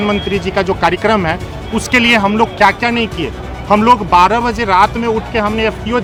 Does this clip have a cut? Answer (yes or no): no